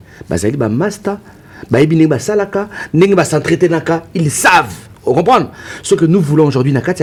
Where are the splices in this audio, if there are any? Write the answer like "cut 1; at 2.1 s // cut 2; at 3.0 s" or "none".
none